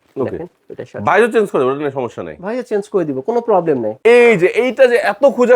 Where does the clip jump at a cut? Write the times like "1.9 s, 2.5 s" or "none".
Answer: 3.9 s